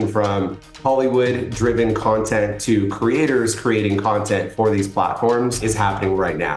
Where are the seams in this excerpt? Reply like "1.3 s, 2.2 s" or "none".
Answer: 5.6 s

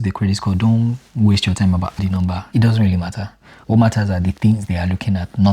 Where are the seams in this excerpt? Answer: 2.4 s

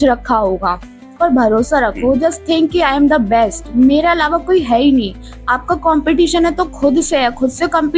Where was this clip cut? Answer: 1.1 s

